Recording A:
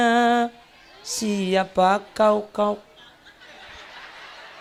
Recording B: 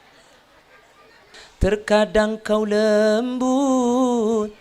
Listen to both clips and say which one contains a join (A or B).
B